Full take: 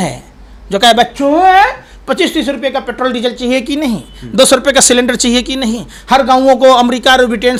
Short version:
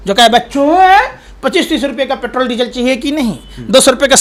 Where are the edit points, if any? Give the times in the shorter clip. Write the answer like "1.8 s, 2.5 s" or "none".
none